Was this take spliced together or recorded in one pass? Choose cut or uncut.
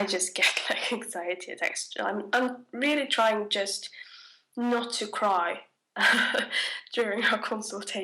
cut